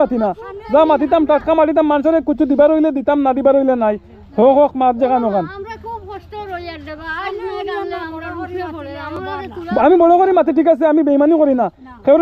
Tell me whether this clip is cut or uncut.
uncut